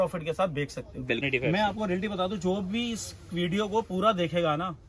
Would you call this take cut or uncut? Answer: cut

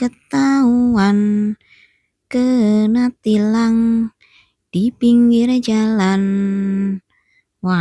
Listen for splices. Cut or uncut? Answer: uncut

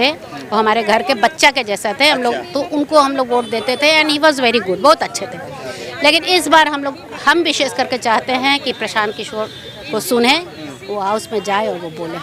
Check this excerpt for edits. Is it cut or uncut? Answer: uncut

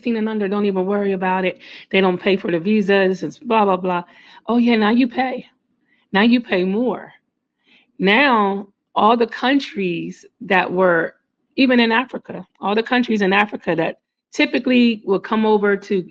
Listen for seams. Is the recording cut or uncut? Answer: uncut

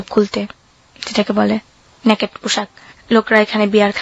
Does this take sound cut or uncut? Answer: uncut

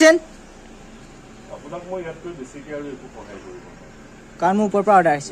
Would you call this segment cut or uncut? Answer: uncut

